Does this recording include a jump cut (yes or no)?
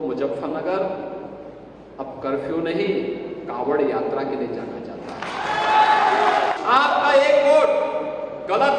yes